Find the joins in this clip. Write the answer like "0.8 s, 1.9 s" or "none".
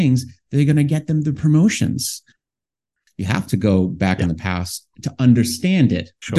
2.6 s